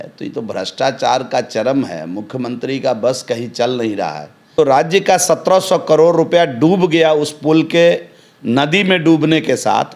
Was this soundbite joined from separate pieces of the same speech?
yes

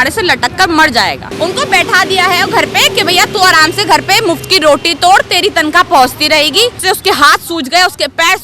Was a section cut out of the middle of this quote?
yes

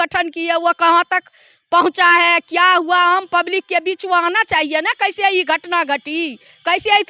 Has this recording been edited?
no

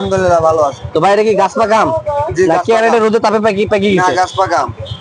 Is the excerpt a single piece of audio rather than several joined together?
yes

